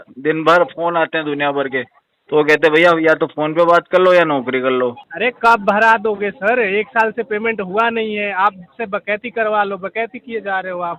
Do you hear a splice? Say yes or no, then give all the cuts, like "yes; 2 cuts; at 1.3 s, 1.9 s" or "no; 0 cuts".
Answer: yes; 1 cut; at 5.1 s